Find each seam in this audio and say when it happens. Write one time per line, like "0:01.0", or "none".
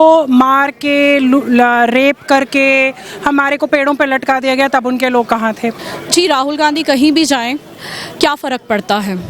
0:05.9